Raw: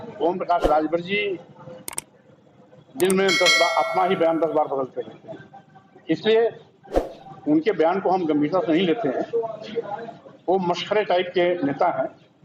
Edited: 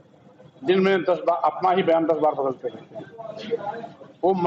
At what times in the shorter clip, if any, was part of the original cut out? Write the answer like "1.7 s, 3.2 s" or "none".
3.3 s